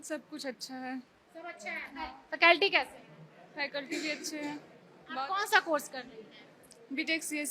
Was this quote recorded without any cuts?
yes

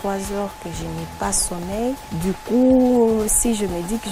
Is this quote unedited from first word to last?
yes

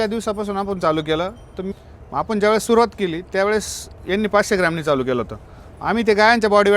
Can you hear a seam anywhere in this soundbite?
yes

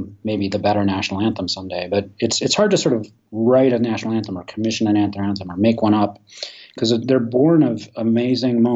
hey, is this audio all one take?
yes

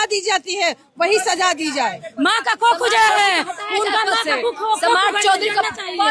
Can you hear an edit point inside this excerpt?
yes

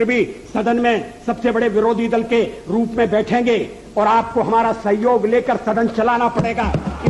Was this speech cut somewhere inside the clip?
no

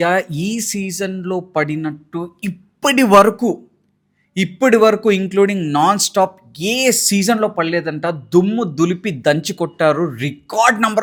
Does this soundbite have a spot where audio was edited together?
no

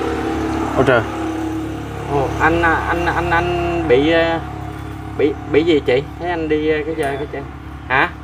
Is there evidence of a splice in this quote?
no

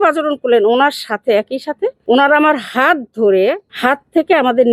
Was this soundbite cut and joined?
yes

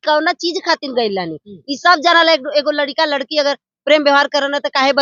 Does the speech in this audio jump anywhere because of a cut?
no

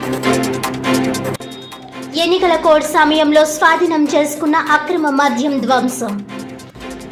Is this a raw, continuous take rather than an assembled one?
yes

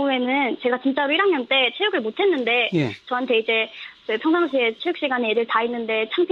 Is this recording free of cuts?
no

